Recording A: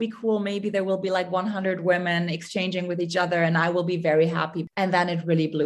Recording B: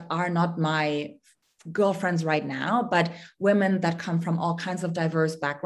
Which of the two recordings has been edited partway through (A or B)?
A